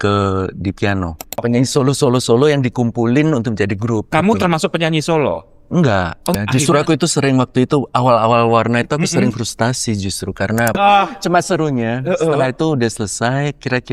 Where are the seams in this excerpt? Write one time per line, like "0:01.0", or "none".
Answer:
0:01.4
0:06.3
0:10.8